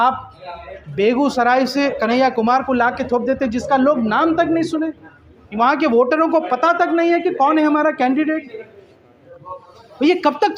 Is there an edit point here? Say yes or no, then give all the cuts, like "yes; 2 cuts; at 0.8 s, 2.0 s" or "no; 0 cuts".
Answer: no; 0 cuts